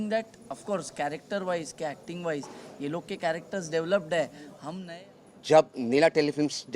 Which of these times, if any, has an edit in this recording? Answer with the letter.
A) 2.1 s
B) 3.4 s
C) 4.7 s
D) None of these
C